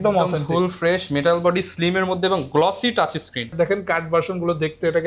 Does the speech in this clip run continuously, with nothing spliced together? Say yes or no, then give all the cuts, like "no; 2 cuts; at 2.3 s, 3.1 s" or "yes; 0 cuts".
no; 1 cut; at 3.5 s